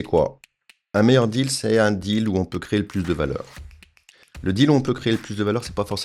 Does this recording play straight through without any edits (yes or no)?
yes